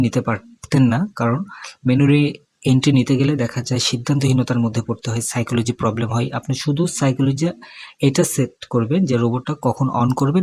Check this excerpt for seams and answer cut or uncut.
uncut